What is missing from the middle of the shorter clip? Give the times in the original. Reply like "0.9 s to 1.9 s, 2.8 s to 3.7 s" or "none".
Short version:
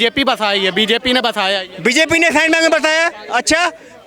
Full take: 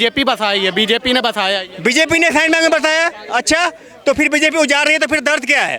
none